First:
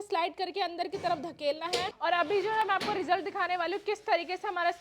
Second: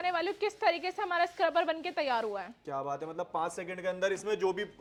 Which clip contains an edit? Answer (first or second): first